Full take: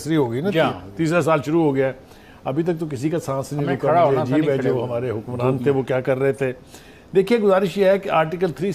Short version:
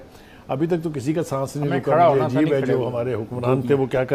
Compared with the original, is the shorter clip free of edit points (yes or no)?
yes